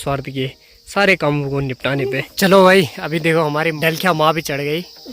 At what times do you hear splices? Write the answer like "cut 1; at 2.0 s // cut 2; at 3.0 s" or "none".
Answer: cut 1; at 2.3 s // cut 2; at 3.8 s

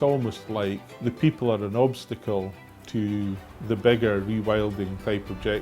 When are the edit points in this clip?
cut 1; at 0.9 s // cut 2; at 3.6 s

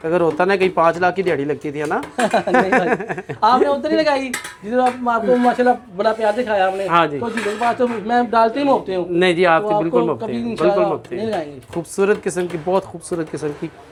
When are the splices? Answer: none

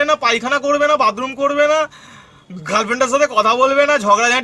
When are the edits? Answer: none

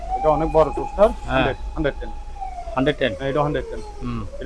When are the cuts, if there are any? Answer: none

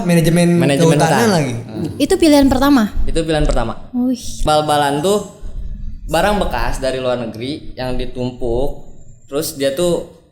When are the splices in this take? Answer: cut 1; at 4.4 s

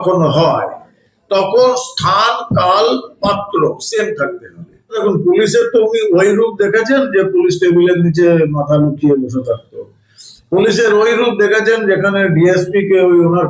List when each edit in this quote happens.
cut 1; at 5.0 s

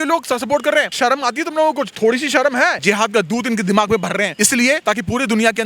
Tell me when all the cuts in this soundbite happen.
cut 1; at 0.9 s // cut 2; at 1.9 s // cut 3; at 2.8 s // cut 4; at 4.7 s

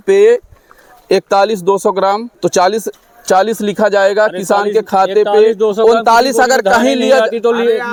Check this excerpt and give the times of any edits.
none

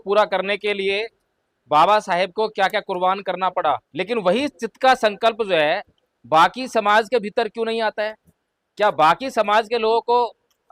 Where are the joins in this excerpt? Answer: cut 1; at 3.9 s

